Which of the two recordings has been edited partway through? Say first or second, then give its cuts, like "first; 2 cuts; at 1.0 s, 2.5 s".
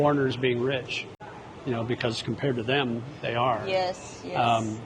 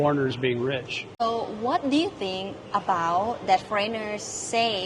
second; 1 cut; at 1.0 s